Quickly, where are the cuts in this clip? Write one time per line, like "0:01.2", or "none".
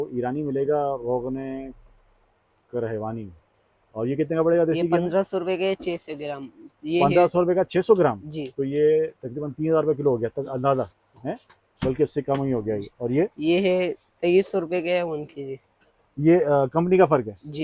none